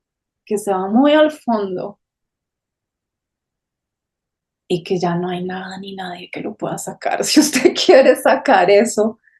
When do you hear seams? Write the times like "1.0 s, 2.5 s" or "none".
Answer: none